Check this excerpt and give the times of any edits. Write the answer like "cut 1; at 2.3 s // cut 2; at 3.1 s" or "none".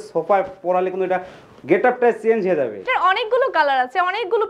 cut 1; at 2.8 s